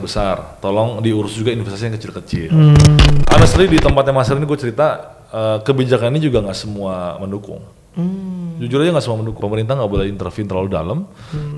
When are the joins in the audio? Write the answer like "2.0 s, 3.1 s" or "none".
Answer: 3.2 s, 9.3 s